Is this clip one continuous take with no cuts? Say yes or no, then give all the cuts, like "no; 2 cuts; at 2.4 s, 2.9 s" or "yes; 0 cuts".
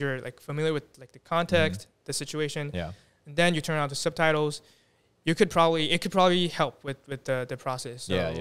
yes; 0 cuts